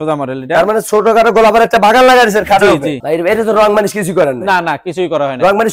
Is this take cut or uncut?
cut